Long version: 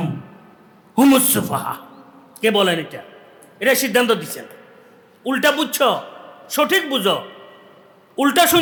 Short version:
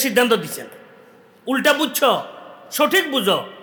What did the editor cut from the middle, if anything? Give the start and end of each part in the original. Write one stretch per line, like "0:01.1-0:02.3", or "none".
none